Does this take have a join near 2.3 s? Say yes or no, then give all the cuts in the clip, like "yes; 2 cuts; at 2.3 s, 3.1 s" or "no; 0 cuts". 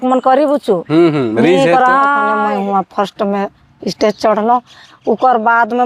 yes; 1 cut; at 2.3 s